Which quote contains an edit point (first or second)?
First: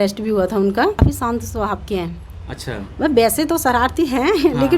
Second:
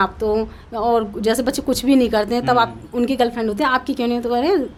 first